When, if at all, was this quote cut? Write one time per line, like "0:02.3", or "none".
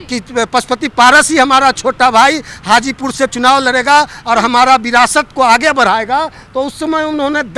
none